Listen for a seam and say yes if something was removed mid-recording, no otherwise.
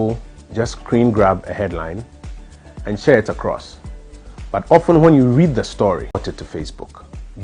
yes